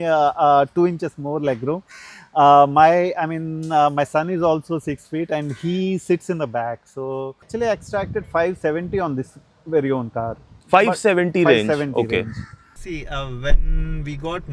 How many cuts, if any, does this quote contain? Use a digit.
2